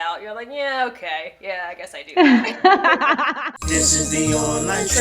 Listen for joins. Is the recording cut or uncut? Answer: cut